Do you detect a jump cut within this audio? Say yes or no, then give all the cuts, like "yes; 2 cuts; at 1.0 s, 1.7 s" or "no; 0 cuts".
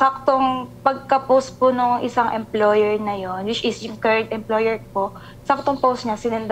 no; 0 cuts